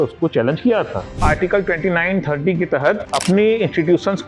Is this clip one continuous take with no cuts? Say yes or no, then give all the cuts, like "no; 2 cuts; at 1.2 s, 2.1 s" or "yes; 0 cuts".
no; 2 cuts; at 1.2 s, 3.1 s